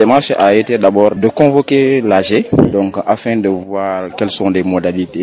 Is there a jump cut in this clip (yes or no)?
yes